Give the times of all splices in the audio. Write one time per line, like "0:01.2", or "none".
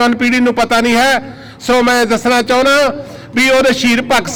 none